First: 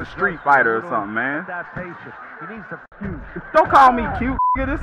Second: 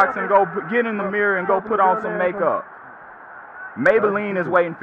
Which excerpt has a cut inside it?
first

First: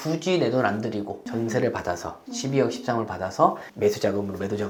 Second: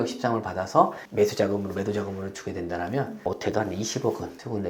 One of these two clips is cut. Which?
second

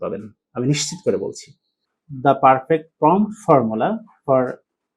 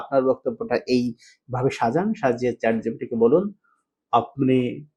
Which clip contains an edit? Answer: first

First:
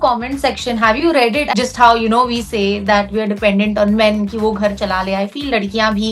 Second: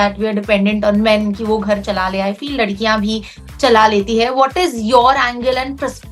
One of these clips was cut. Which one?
first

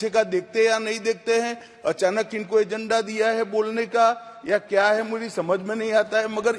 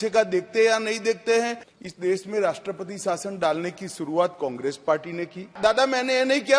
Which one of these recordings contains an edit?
second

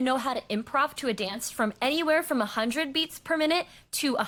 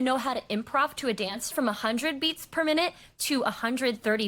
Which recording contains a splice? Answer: second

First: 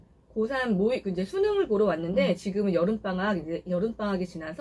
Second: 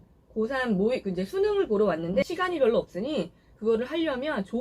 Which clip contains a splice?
second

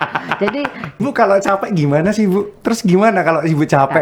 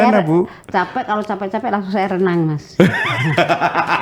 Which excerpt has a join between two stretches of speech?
first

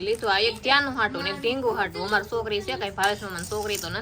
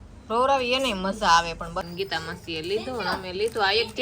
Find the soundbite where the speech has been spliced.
second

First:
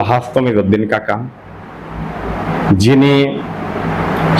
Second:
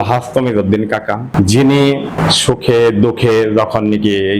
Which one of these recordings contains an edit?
second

